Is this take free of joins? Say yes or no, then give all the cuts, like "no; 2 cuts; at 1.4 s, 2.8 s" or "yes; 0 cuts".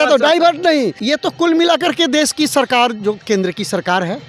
no; 1 cut; at 1.0 s